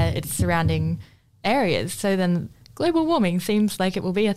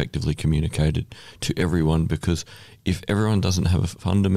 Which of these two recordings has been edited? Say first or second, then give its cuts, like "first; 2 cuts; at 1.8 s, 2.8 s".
first; 1 cut; at 2.6 s